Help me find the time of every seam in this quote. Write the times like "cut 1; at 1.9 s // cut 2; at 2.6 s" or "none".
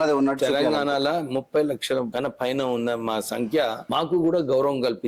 cut 1; at 2.1 s // cut 2; at 3.8 s